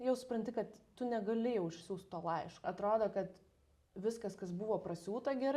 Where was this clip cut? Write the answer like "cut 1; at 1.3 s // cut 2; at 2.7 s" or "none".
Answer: cut 1; at 2.6 s

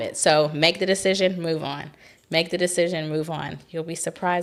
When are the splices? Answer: none

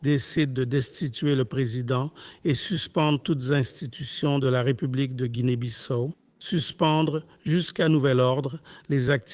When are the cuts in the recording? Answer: cut 1; at 6.3 s

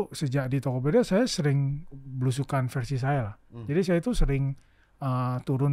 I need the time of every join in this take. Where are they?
none

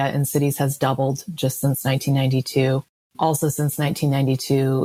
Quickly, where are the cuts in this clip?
none

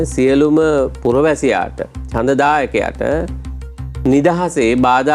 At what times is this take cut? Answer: none

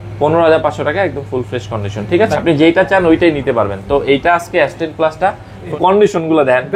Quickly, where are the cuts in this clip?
cut 1; at 2.4 s // cut 2; at 5.7 s

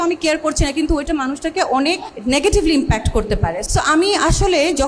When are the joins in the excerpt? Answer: cut 1; at 2.1 s // cut 2; at 3.6 s

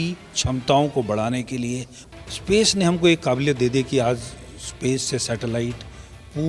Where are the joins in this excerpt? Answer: cut 1; at 1.9 s

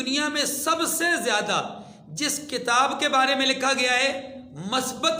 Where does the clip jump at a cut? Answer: none

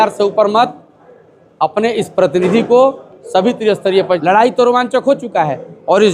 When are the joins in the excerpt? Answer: cut 1; at 4.2 s

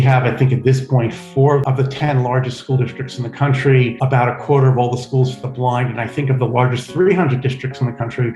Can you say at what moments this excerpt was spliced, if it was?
cut 1; at 1.6 s

